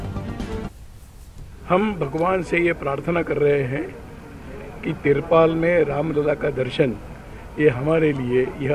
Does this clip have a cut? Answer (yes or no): yes